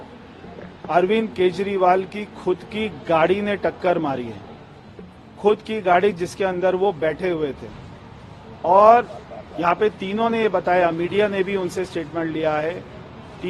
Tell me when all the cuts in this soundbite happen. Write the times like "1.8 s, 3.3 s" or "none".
none